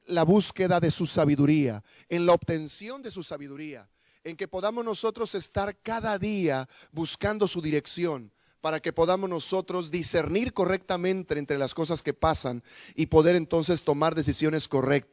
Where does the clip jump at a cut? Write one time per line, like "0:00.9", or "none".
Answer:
0:06.8